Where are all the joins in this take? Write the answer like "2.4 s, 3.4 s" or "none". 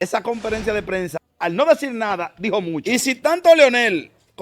1.2 s, 2.8 s